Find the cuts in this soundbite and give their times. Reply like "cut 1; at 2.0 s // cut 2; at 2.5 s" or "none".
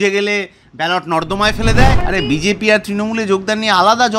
cut 1; at 2.0 s

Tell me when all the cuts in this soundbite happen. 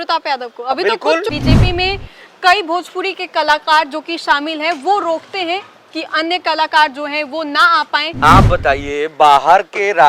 cut 1; at 1.3 s // cut 2; at 8.1 s

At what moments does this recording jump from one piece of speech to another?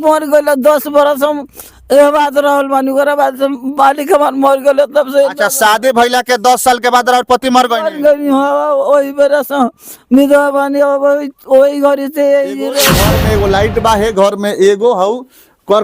cut 1; at 12.9 s

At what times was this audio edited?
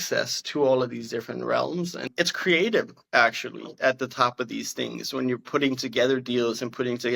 cut 1; at 2.1 s

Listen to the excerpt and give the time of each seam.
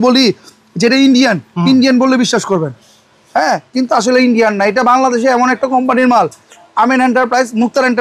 none

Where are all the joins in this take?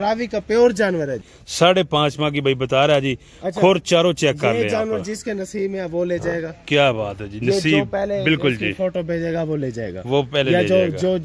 cut 1; at 1.3 s

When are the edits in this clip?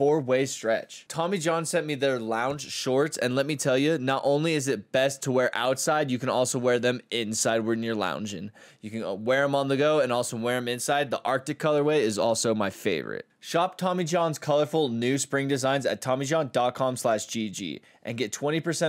cut 1; at 1.0 s

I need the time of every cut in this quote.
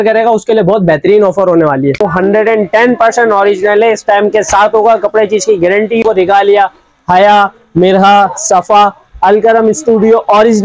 cut 1; at 2.0 s // cut 2; at 6.0 s

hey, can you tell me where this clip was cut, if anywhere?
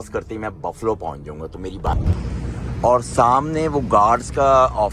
cut 1; at 2.0 s

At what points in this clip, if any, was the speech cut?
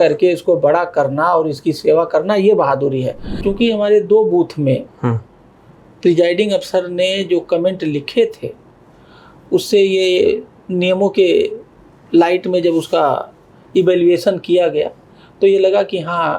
cut 1; at 3.4 s

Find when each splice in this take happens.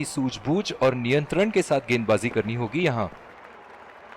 cut 1; at 3.1 s

